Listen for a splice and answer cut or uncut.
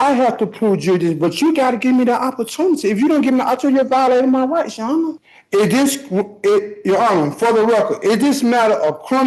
cut